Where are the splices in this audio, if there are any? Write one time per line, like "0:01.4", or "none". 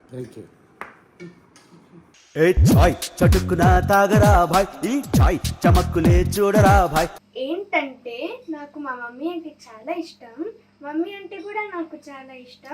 none